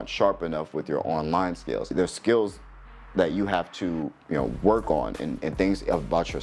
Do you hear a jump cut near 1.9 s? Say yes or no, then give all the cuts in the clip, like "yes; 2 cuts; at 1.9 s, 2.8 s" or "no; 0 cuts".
yes; 1 cut; at 1.9 s